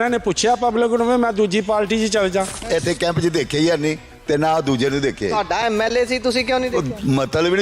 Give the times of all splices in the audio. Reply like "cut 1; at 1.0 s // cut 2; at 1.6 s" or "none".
cut 1; at 2.6 s

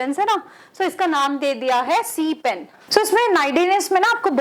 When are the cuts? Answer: cut 1; at 2.7 s

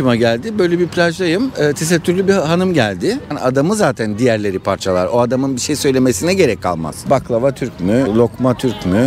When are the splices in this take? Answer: cut 1; at 3.3 s // cut 2; at 7.0 s

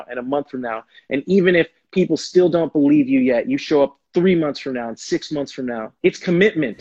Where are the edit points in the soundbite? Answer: cut 1; at 5.9 s

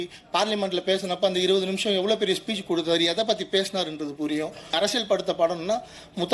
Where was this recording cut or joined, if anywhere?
cut 1; at 4.7 s

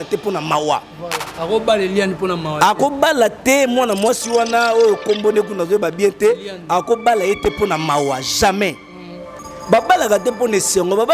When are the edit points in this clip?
none

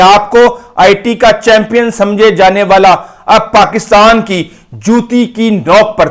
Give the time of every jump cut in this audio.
none

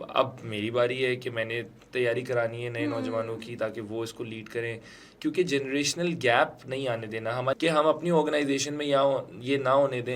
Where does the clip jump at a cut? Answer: cut 1; at 7.6 s

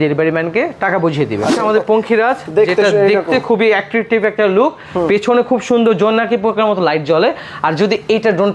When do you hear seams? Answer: cut 1; at 1.5 s

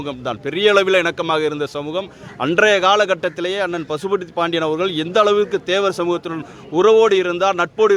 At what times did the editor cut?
none

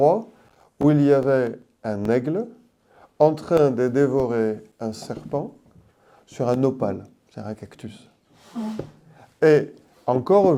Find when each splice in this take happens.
none

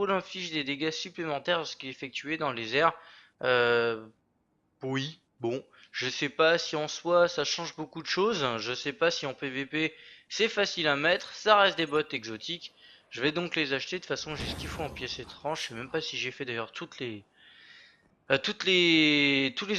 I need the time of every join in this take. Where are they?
cut 1; at 14.0 s

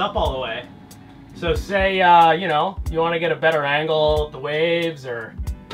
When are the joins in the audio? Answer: none

